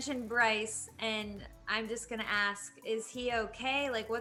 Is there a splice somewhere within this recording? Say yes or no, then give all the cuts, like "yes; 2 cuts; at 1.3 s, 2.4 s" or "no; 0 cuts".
no; 0 cuts